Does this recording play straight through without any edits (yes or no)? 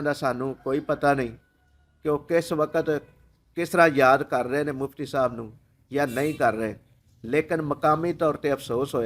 yes